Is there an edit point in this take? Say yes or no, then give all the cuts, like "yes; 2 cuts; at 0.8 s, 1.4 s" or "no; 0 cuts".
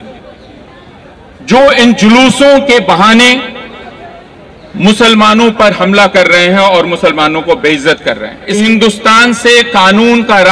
yes; 1 cut; at 8.6 s